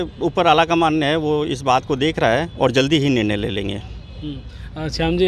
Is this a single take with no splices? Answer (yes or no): yes